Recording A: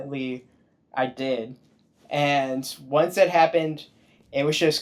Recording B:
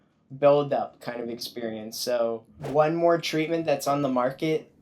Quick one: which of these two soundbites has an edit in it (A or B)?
B